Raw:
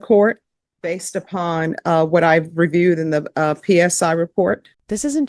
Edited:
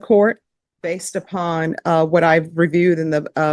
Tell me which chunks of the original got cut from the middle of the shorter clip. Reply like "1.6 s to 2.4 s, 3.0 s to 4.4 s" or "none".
none